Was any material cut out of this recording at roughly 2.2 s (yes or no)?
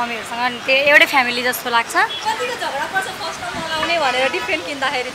yes